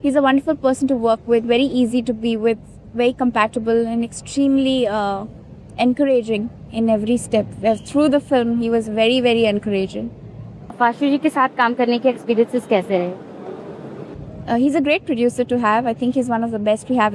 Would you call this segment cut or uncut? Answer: uncut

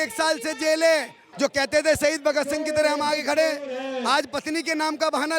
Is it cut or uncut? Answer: cut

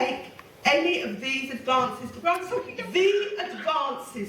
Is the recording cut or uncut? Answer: cut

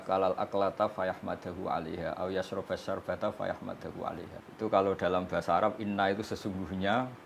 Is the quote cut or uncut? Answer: cut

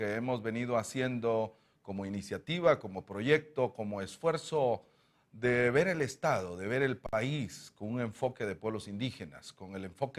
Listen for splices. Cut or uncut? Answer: uncut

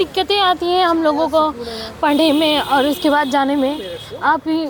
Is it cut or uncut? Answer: uncut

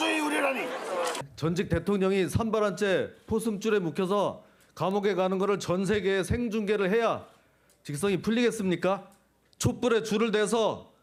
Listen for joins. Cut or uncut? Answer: uncut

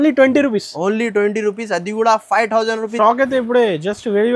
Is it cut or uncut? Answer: cut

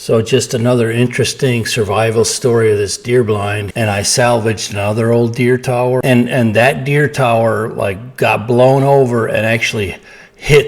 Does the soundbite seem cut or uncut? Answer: cut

